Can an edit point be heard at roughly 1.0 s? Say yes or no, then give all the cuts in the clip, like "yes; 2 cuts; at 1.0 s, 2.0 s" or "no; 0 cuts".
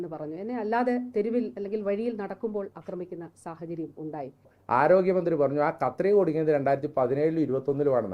no; 1 cut; at 4.6 s